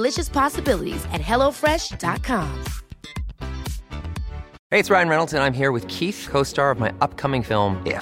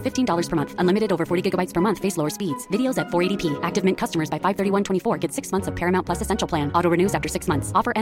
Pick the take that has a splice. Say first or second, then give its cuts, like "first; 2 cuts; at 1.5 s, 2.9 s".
first; 1 cut; at 4.5 s